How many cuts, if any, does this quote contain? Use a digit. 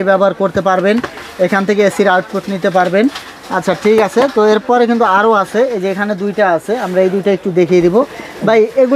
0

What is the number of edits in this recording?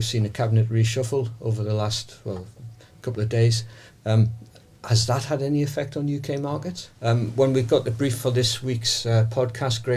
1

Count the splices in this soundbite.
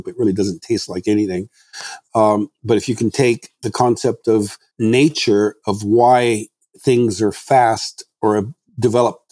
1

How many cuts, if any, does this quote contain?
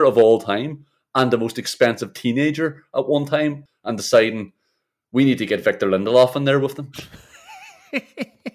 1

